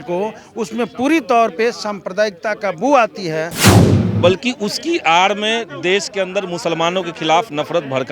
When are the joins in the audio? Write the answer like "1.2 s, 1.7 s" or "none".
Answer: 3.6 s